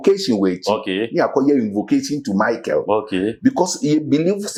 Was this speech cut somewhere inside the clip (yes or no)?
no